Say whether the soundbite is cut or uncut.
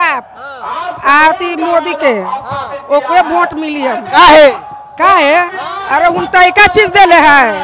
uncut